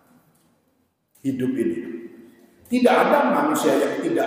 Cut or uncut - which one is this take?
uncut